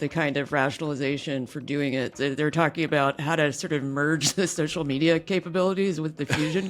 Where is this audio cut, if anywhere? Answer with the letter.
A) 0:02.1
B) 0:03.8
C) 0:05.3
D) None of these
A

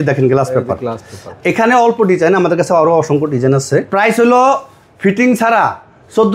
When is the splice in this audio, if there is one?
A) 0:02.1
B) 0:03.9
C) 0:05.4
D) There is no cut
B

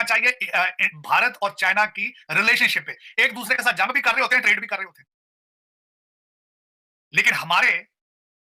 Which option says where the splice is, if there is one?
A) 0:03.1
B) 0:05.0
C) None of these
C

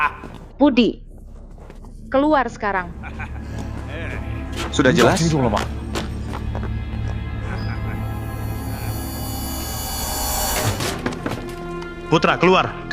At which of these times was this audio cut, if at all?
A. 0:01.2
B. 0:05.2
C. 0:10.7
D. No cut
C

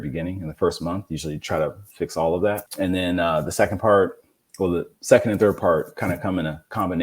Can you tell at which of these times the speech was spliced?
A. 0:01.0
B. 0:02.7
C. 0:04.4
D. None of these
B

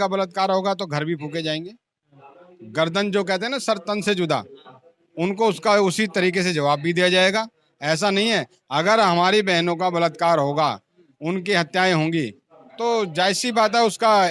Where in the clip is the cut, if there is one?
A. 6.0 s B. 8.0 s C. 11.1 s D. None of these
D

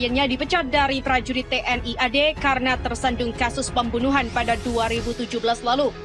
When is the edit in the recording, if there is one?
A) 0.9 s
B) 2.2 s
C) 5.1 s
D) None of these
D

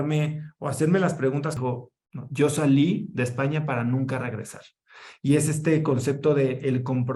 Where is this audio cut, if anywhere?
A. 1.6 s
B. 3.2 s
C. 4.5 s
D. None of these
A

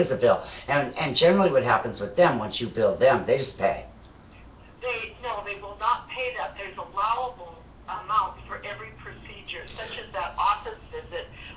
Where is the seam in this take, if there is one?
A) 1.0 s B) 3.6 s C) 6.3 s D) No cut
A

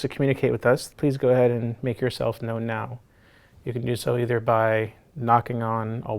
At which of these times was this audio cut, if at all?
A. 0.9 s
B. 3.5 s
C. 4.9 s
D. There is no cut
A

